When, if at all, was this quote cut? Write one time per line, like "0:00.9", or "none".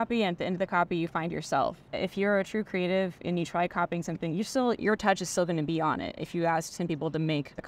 0:01.9